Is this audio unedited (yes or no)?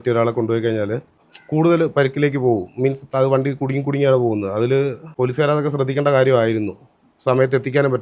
yes